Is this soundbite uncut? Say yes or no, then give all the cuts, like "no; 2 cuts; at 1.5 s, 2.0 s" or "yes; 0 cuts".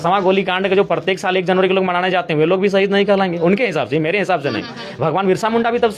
yes; 0 cuts